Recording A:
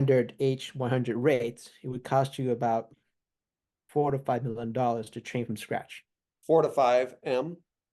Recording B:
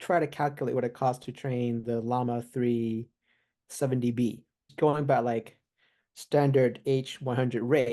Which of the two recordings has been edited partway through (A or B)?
B